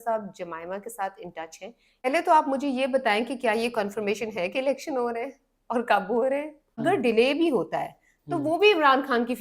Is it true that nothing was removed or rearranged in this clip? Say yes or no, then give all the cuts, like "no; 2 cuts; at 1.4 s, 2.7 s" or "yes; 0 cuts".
no; 2 cuts; at 2.1 s, 6.8 s